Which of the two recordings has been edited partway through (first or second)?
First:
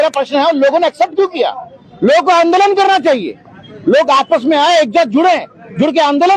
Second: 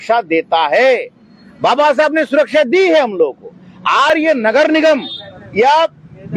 second